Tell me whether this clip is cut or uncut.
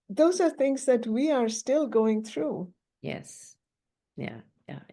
uncut